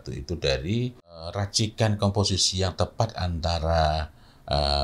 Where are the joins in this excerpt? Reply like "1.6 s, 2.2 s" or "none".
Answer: 1.4 s